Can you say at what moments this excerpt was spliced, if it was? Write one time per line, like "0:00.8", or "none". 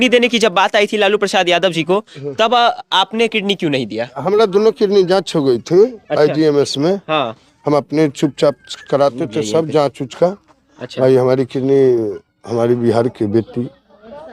none